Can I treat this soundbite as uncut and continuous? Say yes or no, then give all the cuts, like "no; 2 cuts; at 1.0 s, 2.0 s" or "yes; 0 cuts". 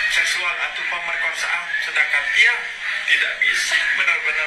yes; 0 cuts